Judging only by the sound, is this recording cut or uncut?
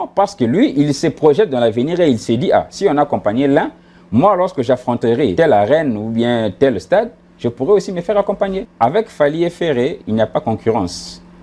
cut